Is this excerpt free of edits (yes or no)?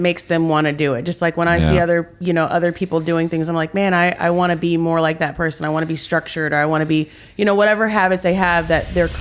yes